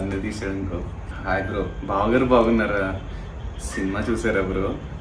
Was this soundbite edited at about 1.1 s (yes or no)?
yes